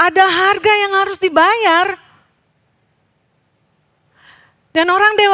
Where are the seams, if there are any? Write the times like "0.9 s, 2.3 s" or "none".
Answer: none